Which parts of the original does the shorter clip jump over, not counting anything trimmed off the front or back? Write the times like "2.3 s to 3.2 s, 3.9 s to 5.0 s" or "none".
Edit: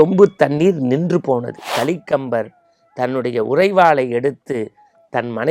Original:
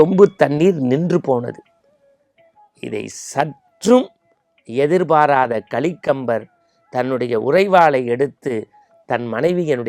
1.7 s to 5.7 s